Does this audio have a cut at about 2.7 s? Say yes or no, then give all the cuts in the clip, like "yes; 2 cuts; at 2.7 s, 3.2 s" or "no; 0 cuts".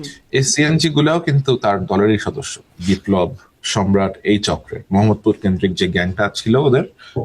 yes; 1 cut; at 2.7 s